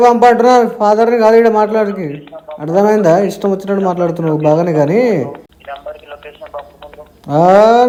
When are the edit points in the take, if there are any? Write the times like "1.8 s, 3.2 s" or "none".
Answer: none